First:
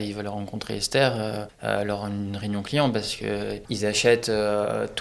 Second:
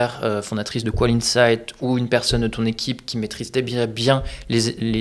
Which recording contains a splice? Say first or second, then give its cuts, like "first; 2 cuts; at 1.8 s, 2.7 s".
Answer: first; 2 cuts; at 1.5 s, 3.6 s